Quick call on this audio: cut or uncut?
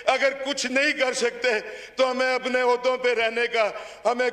uncut